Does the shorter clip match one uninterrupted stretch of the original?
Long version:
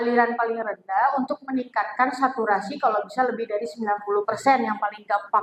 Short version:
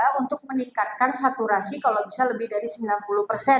yes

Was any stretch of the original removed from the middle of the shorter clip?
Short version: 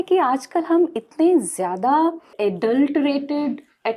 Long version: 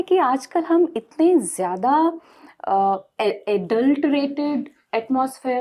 yes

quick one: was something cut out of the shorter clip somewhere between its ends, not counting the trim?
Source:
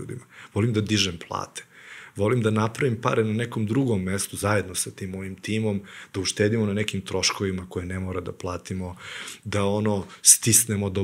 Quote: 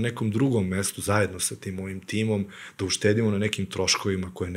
no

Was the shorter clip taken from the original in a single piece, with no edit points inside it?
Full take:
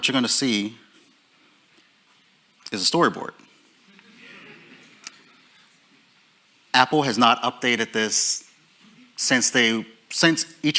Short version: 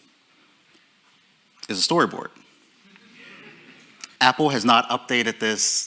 no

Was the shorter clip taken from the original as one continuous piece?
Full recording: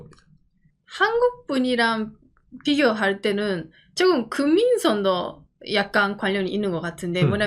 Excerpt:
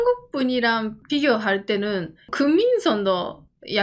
no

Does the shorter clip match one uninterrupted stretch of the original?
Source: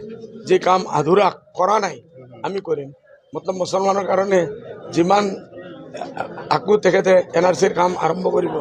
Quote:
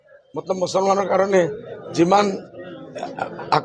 yes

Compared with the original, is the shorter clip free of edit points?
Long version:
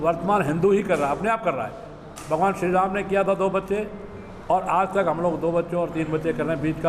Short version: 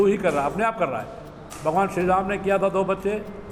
yes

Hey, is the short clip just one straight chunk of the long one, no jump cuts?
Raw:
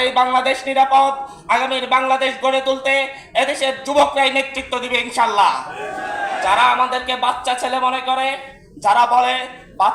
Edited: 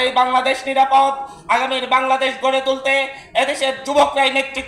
yes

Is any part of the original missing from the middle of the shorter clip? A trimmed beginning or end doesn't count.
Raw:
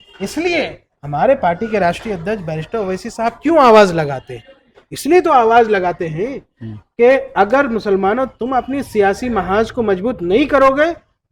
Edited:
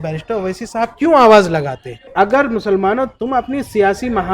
yes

